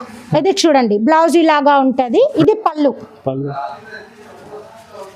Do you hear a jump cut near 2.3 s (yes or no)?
yes